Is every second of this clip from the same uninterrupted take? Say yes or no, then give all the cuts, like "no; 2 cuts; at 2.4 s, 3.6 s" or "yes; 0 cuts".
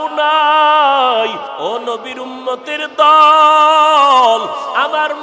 no; 1 cut; at 1.4 s